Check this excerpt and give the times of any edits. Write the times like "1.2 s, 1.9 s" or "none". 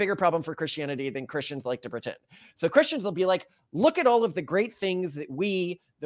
none

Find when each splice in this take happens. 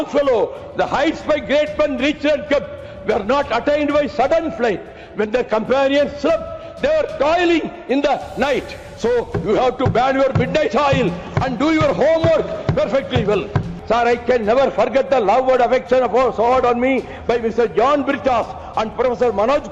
13.7 s

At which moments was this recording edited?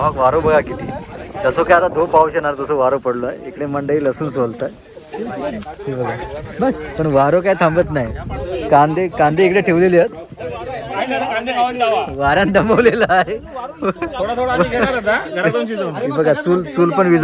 none

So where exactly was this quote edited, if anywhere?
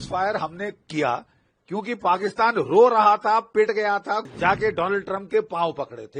4.2 s

